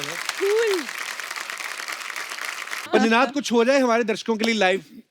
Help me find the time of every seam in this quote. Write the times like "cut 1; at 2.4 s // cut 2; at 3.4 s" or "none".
cut 1; at 2.8 s